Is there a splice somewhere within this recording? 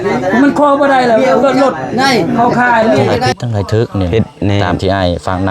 yes; 1 cut; at 3.3 s

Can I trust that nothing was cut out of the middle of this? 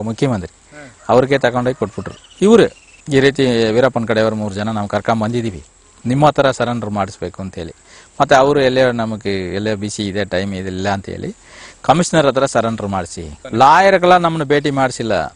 yes; 0 cuts

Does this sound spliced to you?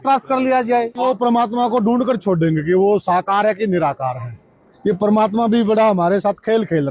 yes; 1 cut; at 1.0 s

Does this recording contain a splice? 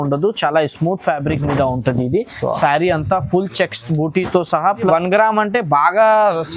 yes; 1 cut; at 4.9 s

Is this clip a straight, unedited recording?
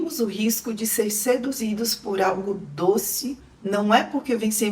no; 1 cut; at 3.4 s

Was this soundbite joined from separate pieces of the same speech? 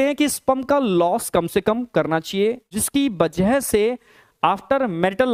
yes; 1 cut; at 2.7 s

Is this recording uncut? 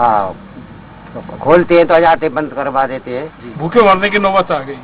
no; 1 cut; at 3.5 s

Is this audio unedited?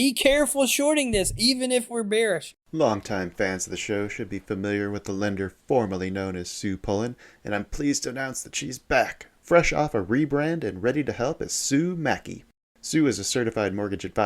no; 1 cut; at 2.5 s

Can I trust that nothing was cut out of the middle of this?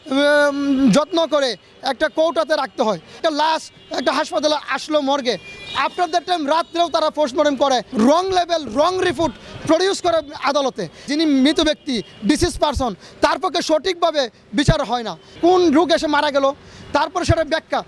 no; 4 cuts; at 3.1 s, 7.9 s, 11.0 s, 15.4 s

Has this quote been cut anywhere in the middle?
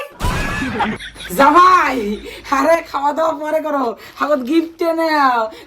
yes; 1 cut; at 1.0 s

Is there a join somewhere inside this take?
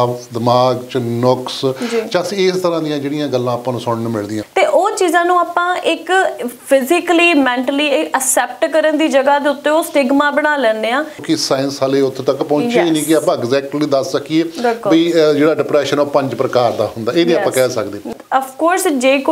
yes; 3 cuts; at 4.3 s, 11.2 s, 18.0 s

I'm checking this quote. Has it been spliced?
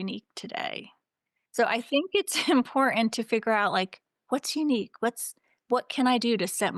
no; 0 cuts

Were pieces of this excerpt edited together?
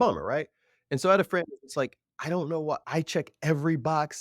yes; 1 cut; at 2.8 s

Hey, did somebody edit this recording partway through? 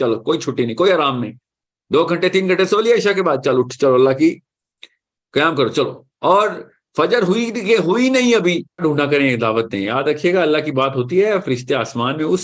yes; 1 cut; at 8.8 s

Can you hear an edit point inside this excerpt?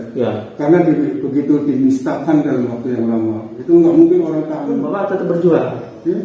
yes; 1 cut; at 4.9 s

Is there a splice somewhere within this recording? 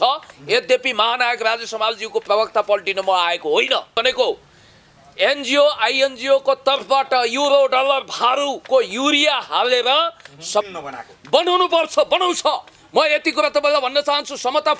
yes; 2 cuts; at 4.0 s, 10.6 s

